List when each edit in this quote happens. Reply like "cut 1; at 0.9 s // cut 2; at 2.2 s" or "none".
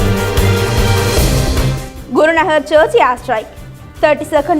cut 1; at 1.5 s